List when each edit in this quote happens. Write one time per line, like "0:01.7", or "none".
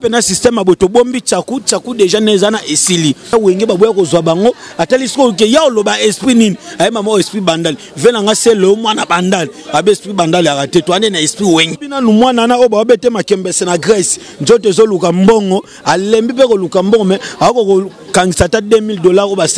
0:03.3
0:11.8